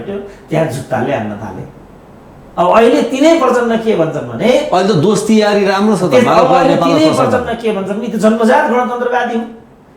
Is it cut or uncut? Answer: uncut